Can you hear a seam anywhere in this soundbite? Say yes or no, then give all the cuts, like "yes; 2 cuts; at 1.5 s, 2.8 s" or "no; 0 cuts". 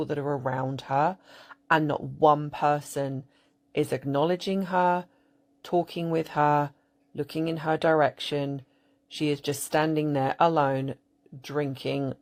no; 0 cuts